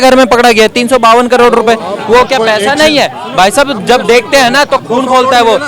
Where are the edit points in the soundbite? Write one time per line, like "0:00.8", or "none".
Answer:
none